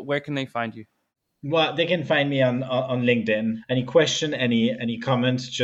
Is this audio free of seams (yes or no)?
no